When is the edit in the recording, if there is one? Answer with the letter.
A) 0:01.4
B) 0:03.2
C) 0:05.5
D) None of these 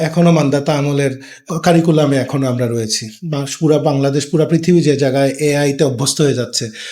A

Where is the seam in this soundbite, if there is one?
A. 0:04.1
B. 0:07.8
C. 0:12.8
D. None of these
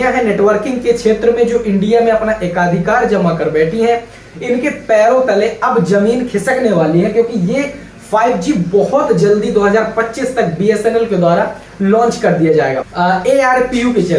C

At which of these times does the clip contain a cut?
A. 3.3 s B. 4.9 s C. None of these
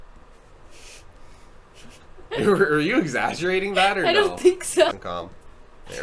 B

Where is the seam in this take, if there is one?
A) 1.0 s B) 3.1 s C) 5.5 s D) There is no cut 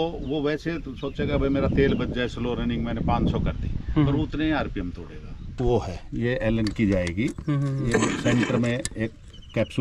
C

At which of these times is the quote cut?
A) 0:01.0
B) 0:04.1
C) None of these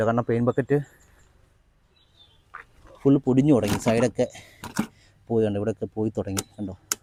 C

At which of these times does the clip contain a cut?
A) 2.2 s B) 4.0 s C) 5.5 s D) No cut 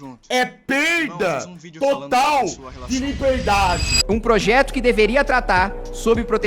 B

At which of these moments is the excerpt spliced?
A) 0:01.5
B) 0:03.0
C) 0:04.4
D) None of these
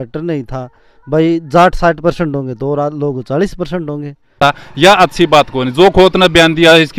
C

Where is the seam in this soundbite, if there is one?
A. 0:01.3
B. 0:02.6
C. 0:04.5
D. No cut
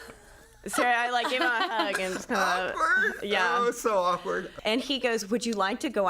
C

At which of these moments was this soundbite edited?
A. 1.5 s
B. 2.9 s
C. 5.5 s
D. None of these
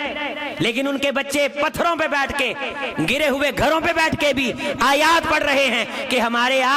D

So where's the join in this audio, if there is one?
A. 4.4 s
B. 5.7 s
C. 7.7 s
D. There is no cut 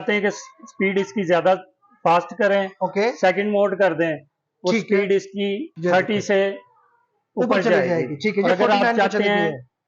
B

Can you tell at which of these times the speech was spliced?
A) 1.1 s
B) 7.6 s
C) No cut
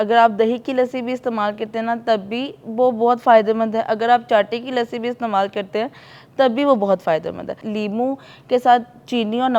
B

